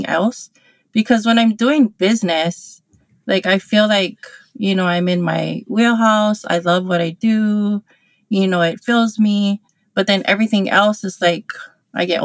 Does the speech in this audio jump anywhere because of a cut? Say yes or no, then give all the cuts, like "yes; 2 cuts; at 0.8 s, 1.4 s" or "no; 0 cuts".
no; 0 cuts